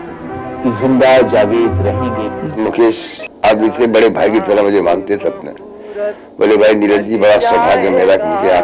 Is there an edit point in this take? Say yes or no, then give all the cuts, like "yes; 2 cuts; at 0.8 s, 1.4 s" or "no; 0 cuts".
yes; 1 cut; at 2.5 s